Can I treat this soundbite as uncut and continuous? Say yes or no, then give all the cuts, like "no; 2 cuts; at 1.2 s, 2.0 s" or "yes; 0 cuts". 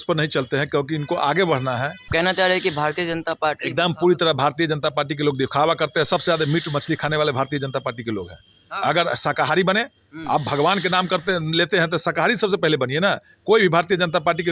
no; 1 cut; at 2.1 s